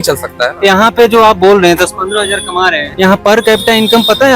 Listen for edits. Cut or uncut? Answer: cut